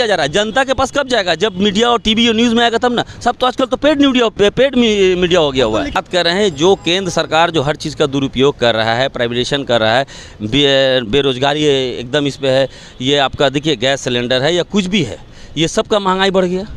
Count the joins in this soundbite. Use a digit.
1